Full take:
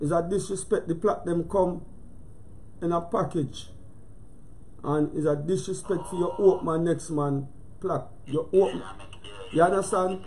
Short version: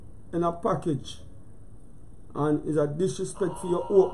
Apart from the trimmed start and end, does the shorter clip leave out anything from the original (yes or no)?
no